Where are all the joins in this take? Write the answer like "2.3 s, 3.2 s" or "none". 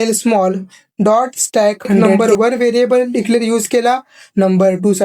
2.1 s